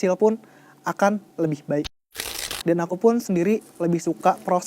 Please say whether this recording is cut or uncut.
cut